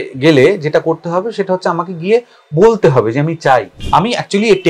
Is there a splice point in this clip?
yes; 1 cut; at 3.8 s

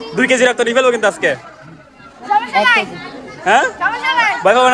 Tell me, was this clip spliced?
no; 0 cuts

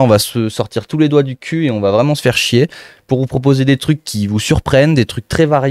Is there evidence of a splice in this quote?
no; 0 cuts

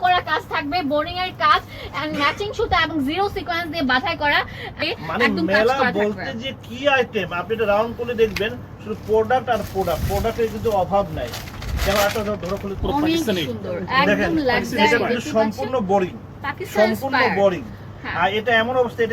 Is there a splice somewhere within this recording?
yes; 2 cuts; at 4.8 s, 12.8 s

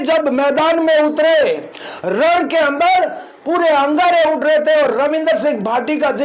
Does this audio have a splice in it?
yes; 1 cut; at 1.6 s

